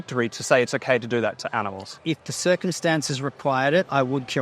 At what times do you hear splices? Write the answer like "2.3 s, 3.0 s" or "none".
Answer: 1.8 s